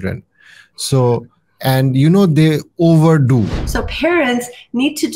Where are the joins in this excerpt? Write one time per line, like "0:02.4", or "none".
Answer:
0:03.6